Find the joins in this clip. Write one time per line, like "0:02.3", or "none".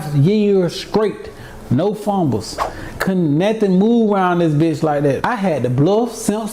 0:05.2